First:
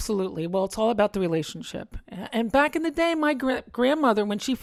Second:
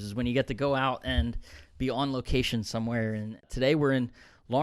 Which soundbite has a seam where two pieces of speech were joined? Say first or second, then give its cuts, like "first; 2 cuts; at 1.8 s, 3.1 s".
second; 1 cut; at 3.5 s